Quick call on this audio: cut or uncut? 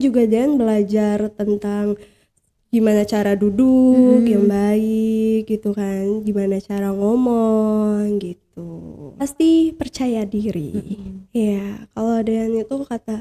cut